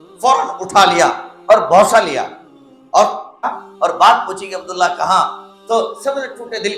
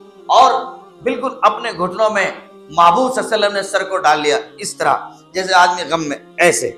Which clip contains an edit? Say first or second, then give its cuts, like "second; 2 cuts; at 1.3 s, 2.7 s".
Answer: first; 1 cut; at 3.4 s